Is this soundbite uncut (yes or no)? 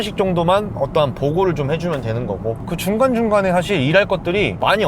no